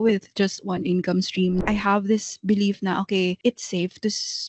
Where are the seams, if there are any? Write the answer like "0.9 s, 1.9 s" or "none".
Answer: 1.6 s, 3.4 s